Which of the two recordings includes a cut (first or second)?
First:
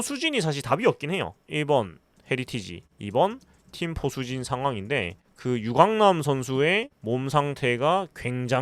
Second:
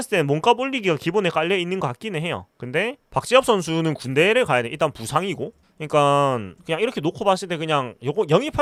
first